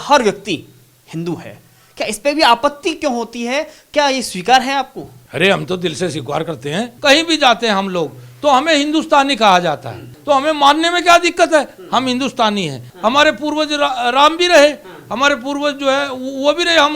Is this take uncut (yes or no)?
no